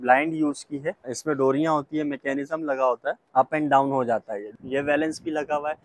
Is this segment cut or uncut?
cut